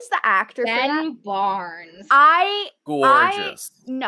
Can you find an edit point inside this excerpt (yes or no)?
yes